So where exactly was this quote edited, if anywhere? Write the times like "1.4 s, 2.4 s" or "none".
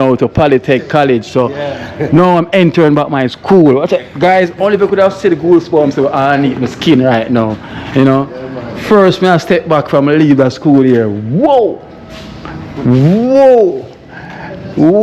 none

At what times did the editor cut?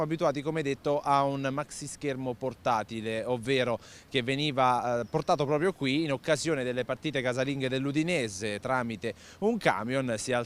3.4 s

